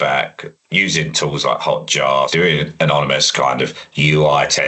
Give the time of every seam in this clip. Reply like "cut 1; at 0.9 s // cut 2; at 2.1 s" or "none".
cut 1; at 2.3 s

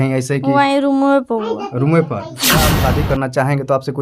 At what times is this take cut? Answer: cut 1; at 2.7 s

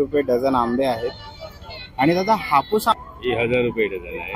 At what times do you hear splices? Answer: cut 1; at 3.0 s

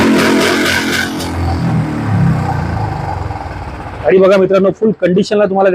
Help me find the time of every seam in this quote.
cut 1; at 1.9 s

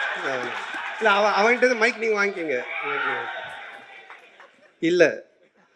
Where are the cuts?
none

